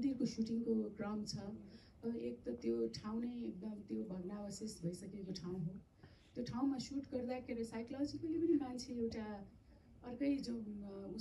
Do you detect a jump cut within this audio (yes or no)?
no